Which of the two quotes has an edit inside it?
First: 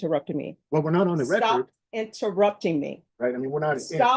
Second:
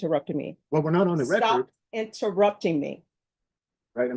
first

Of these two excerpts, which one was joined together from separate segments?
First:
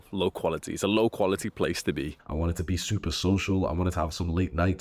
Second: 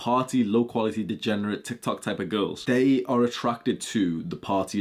first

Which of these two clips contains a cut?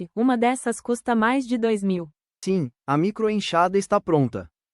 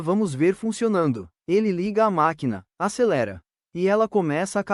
first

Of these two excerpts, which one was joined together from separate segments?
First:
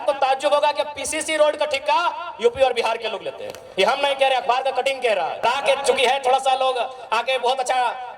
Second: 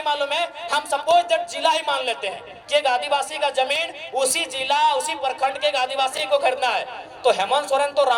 first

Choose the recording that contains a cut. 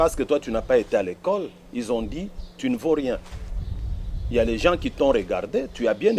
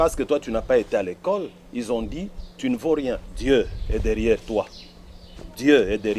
second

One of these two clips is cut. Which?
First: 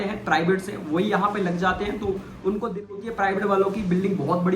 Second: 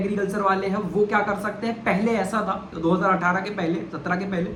first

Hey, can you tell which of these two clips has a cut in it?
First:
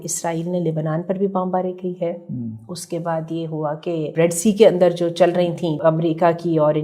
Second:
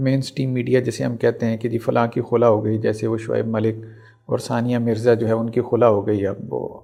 first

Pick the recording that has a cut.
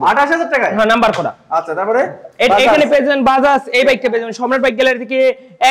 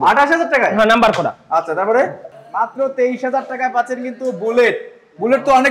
second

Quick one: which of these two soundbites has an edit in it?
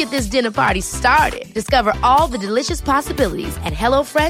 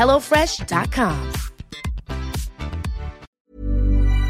second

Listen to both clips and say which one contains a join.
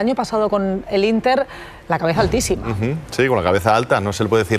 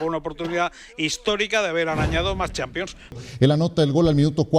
second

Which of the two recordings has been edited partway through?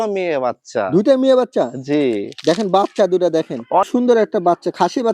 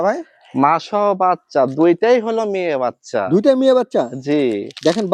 first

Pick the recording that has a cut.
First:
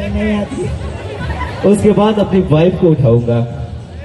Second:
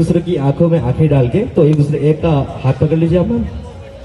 second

